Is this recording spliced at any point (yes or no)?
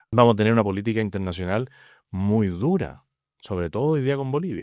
no